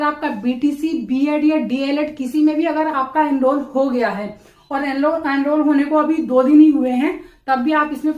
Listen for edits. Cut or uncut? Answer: uncut